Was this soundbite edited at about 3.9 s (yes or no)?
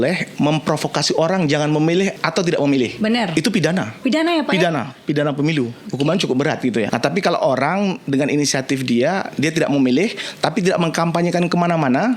yes